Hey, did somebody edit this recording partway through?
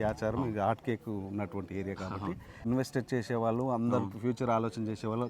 yes; 1 cut; at 2.6 s

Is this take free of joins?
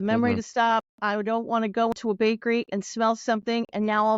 no; 1 cut; at 1.9 s

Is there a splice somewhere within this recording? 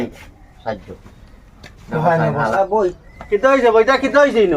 yes; 1 cut; at 2.5 s

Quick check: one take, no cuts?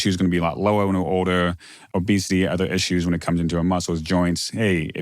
no; 1 cut; at 1.7 s

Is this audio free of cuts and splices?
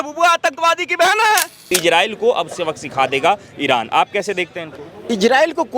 no; 1 cut; at 1.6 s

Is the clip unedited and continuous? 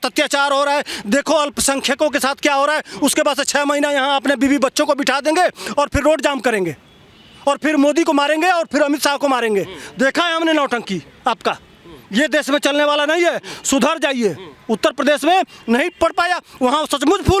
yes; 0 cuts

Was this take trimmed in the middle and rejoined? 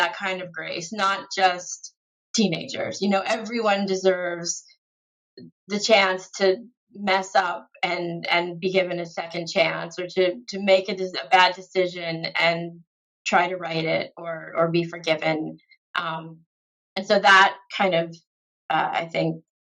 no; 0 cuts

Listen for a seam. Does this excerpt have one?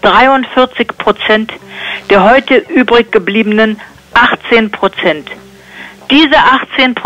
yes; 1 cut; at 1.5 s

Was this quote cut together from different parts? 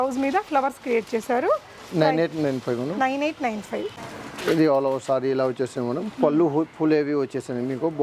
no; 0 cuts

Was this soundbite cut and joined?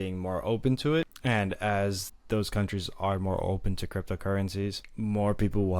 yes; 3 cuts; at 1.1 s, 2.1 s, 4.8 s

